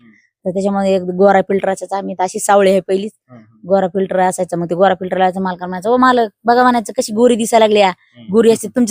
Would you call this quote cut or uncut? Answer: uncut